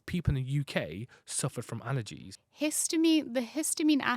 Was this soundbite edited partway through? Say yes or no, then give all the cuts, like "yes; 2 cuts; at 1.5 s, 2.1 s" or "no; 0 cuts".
yes; 1 cut; at 2.3 s